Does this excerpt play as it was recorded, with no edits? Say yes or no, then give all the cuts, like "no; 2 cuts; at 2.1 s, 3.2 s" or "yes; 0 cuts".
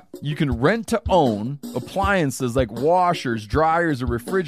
yes; 0 cuts